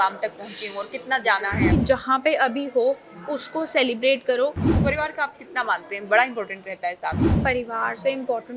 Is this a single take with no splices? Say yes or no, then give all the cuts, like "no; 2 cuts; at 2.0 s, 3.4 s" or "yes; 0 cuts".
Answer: no; 3 cuts; at 1.7 s, 4.7 s, 7.3 s